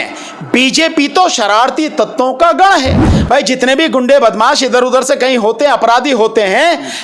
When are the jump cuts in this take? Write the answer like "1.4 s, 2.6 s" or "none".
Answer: 3.1 s